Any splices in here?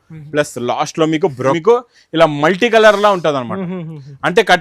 yes; 1 cut; at 1.6 s

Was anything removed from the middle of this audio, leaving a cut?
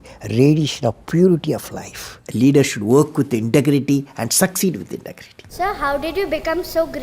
yes; 2 cuts; at 2.2 s, 5.5 s

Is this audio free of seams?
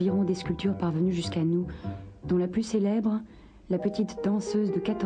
yes; 0 cuts

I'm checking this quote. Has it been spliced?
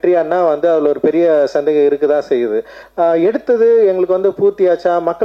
yes; 1 cut; at 2.8 s

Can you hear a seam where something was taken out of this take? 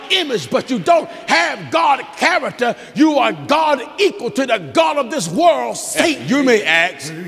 yes; 1 cut; at 6.2 s

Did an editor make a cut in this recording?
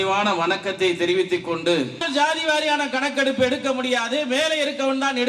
yes; 1 cut; at 2.0 s

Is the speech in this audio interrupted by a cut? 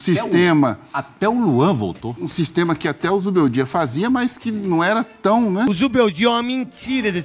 yes; 1 cut; at 5.7 s

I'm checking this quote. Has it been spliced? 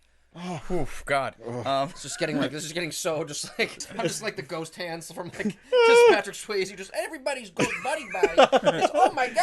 yes; 1 cut; at 3.8 s

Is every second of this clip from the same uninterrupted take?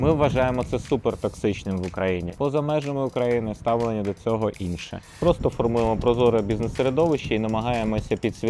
no; 2 cuts; at 2.3 s, 5.1 s

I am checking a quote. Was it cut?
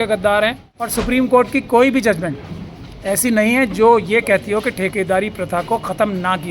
yes; 1 cut; at 1.0 s

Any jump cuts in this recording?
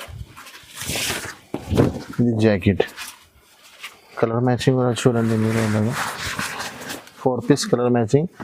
no; 0 cuts

